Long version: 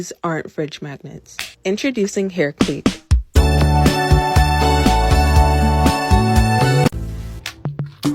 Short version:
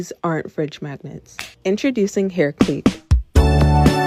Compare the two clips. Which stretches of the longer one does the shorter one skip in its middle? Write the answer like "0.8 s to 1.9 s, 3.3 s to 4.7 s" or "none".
none